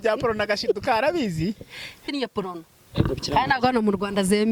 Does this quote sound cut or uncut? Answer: cut